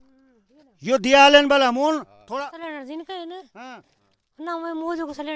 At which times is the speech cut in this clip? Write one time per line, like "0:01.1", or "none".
0:02.5